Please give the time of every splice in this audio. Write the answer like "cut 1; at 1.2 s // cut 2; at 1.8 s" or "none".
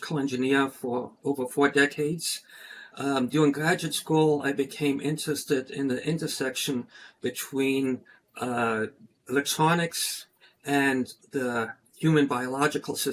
none